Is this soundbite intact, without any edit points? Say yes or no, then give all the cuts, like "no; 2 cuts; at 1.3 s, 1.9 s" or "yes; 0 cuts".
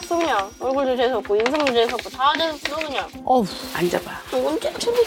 yes; 0 cuts